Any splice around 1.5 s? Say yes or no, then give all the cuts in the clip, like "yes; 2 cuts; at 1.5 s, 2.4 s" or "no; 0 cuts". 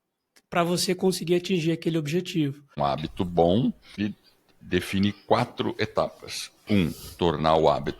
no; 2 cuts; at 2.7 s, 4.0 s